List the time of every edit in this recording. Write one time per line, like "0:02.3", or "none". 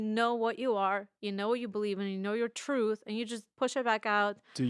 0:03.4